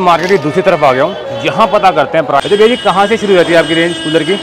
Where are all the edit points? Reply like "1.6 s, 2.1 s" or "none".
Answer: 2.4 s